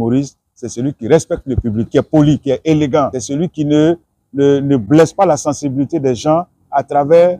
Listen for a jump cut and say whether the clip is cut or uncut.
cut